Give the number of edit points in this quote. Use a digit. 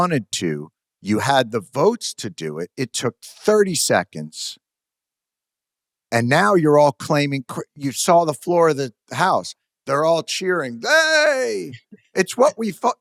0